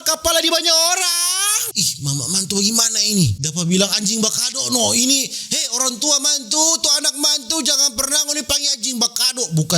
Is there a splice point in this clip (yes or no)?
yes